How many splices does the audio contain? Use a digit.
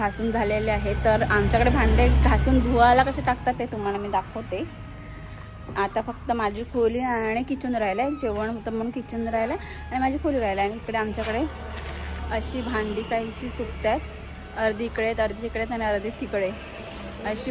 0